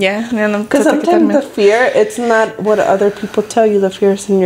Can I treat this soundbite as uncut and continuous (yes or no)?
yes